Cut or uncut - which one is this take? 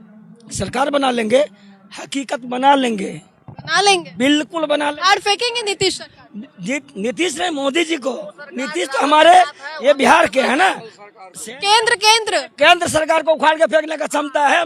uncut